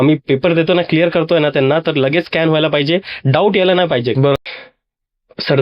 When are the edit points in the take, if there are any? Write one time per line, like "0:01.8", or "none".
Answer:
0:04.4

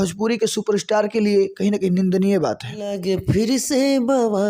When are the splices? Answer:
0:02.9

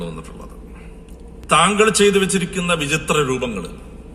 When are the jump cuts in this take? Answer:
0:01.4

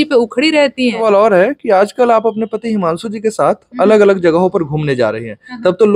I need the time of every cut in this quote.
0:01.0

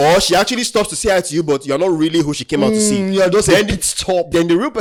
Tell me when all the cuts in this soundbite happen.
none

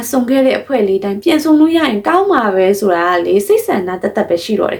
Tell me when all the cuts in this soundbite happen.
none

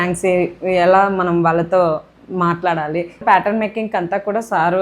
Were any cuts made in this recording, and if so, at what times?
0:03.2

